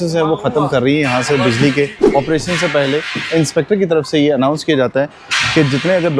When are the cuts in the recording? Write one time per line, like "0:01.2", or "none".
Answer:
0:02.0